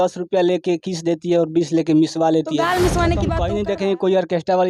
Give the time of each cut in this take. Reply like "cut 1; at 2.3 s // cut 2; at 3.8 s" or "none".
cut 1; at 3.4 s